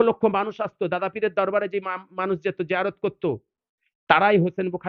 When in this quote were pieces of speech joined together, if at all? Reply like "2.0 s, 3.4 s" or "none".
none